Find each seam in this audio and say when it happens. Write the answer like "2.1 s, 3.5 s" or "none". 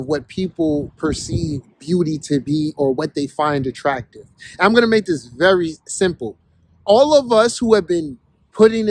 none